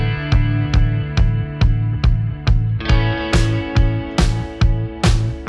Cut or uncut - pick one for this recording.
uncut